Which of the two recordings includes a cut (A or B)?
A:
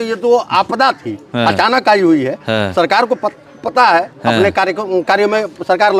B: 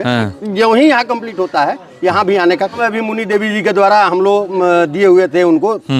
B